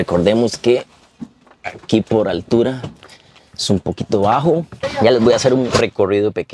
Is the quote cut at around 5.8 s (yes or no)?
yes